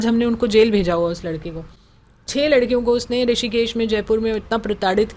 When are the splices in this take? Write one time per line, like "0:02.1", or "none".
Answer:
none